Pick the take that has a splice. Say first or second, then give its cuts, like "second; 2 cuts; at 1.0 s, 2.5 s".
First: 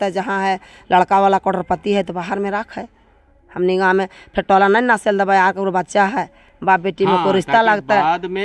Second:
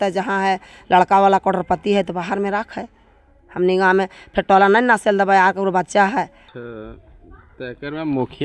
second; 1 cut; at 6.4 s